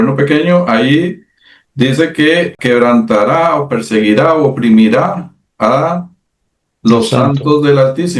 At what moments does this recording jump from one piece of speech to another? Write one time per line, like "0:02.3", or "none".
0:02.6